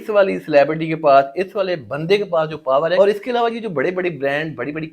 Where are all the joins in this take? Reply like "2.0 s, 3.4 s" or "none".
3.0 s